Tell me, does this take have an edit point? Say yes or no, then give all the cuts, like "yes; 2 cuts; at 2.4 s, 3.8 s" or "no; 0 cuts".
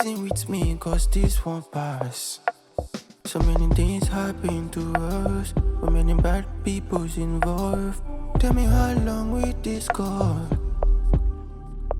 no; 0 cuts